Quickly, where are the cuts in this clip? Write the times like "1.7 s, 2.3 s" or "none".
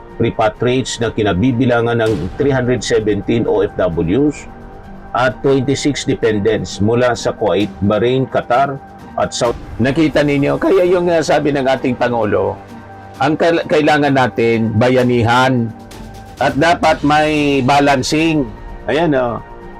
9.5 s